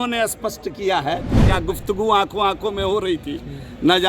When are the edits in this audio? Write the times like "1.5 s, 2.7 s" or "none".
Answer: 1.4 s